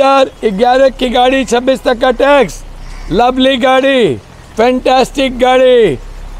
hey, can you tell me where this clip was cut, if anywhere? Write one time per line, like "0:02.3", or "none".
none